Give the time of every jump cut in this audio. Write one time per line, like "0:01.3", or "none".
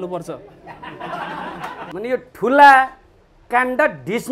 0:01.8